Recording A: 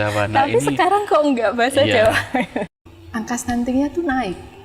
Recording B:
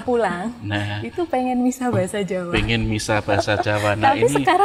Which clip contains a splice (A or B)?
A